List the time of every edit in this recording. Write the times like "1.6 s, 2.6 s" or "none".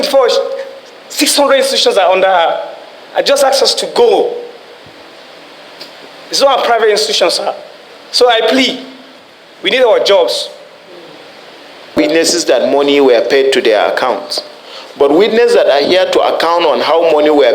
12.0 s

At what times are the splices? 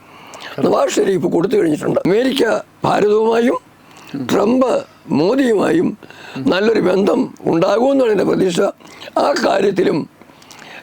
2.0 s

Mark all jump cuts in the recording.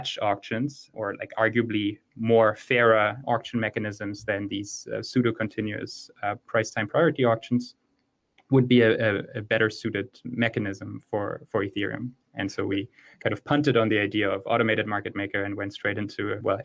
none

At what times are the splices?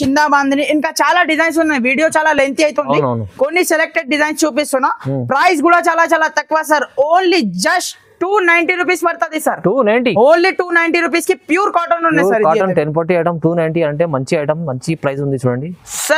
none

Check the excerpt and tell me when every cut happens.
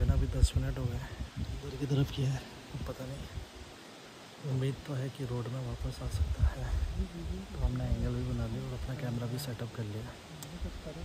none

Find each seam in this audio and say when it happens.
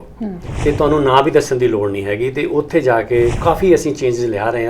3.4 s

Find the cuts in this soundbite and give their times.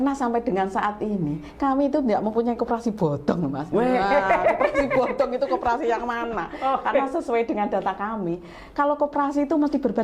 none

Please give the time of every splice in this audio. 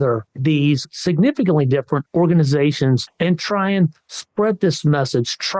0.9 s, 2.1 s, 3.1 s

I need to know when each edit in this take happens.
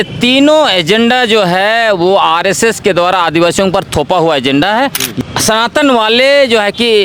5.0 s

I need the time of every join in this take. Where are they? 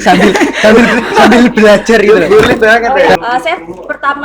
3.2 s

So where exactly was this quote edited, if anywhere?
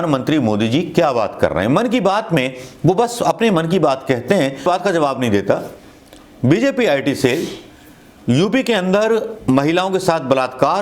4.6 s

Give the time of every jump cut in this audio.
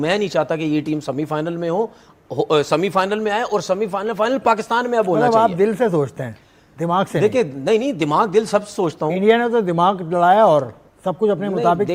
none

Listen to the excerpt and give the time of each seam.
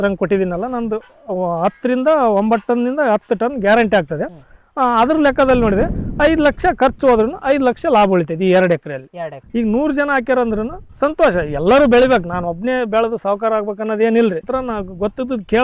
9.5 s, 14.5 s

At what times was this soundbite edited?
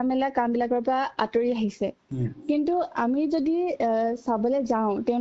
none

